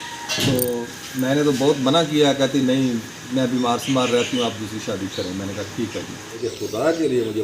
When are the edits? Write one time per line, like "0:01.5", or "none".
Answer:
0:06.5